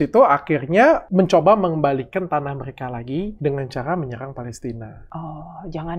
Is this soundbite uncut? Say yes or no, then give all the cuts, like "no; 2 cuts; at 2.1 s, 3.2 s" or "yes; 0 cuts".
no; 3 cuts; at 1.1 s, 3.3 s, 5.0 s